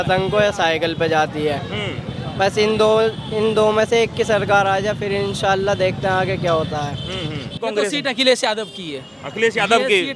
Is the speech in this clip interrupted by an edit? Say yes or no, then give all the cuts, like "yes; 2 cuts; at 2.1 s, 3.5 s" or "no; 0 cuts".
yes; 1 cut; at 7.6 s